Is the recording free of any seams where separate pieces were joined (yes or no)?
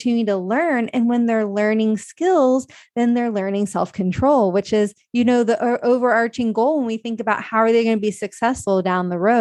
yes